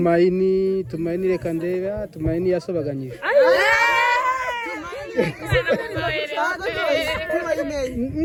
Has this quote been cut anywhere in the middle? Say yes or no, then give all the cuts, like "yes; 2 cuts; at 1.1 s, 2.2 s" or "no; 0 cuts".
no; 0 cuts